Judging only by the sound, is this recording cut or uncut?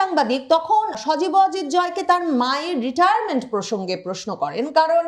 cut